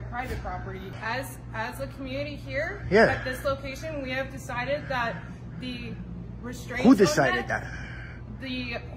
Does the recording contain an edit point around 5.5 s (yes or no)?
no